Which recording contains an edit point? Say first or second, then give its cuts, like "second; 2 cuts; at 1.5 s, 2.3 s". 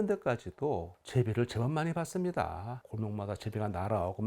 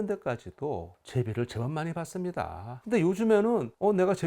second; 1 cut; at 2.7 s